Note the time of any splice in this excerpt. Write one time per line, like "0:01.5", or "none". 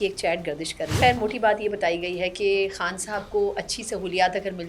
0:01.0